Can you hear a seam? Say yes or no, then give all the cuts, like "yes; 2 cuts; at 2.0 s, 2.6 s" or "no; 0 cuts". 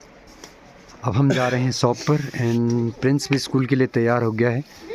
no; 0 cuts